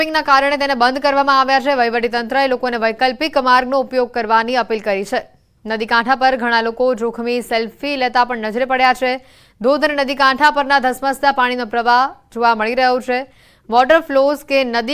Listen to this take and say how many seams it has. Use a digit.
1